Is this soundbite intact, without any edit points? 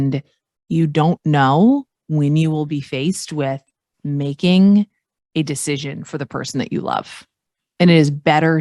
yes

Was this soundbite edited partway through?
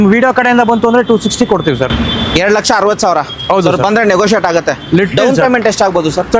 no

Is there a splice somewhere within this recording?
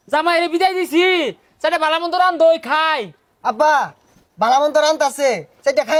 no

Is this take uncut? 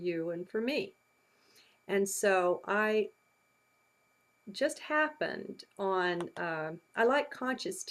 yes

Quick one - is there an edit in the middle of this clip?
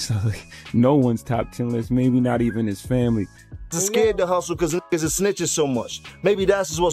yes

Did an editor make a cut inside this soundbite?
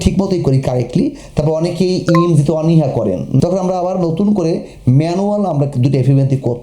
yes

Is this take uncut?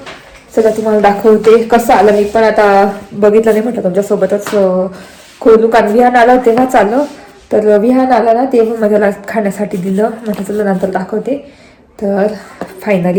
yes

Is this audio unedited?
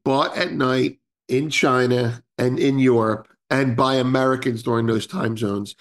no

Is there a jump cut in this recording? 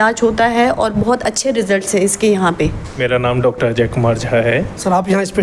no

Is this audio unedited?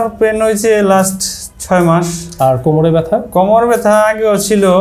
yes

